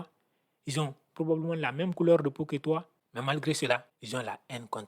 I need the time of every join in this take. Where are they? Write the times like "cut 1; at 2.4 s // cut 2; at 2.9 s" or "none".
cut 1; at 3.9 s